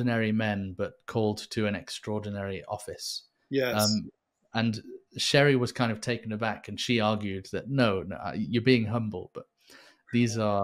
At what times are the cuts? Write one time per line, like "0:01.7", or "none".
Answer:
none